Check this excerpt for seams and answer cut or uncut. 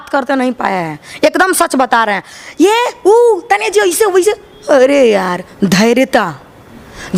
uncut